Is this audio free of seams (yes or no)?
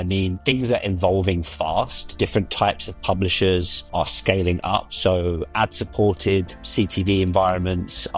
yes